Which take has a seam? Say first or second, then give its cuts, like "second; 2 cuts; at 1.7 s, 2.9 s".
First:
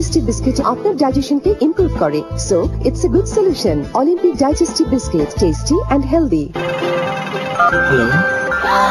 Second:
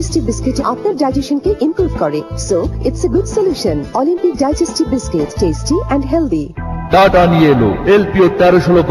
first; 1 cut; at 6.5 s